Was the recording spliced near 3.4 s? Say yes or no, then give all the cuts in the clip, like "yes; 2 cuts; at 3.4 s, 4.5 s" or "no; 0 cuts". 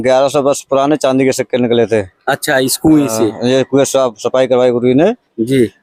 no; 0 cuts